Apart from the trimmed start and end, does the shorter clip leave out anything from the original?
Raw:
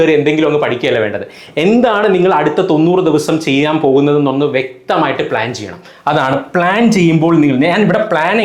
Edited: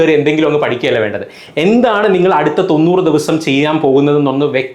no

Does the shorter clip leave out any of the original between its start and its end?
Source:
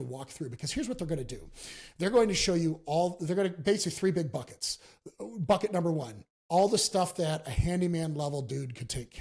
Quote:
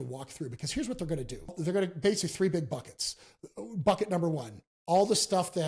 yes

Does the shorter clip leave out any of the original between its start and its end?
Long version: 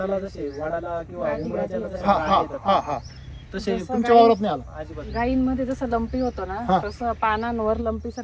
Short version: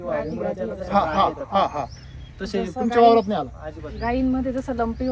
no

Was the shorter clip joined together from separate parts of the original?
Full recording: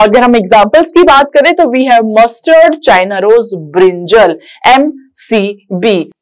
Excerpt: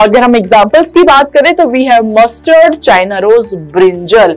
no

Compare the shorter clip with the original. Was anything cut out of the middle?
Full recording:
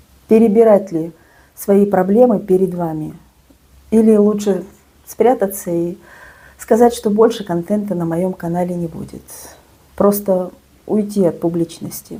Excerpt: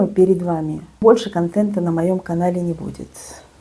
yes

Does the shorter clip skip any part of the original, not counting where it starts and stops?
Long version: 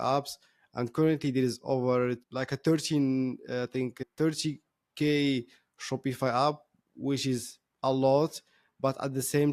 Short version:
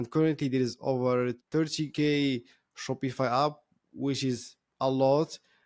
yes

